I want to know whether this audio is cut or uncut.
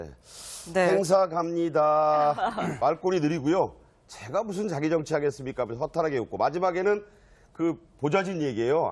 uncut